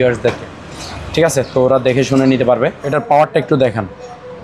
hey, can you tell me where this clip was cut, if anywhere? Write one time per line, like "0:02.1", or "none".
0:02.9